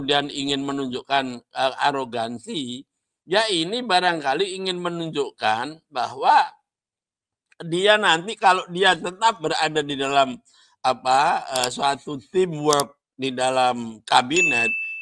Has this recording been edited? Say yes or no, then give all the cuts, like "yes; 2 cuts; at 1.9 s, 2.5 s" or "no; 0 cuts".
no; 0 cuts